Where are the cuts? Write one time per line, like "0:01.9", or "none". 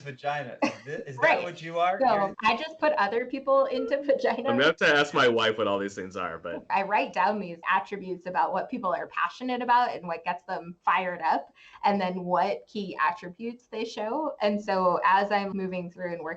0:02.4
0:06.7